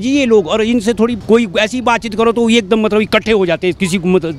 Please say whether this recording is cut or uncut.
cut